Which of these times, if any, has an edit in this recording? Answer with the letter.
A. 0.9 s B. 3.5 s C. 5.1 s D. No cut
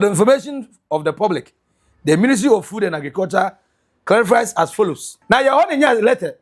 C